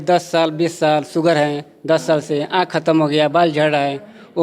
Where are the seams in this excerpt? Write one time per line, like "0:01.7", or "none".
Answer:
none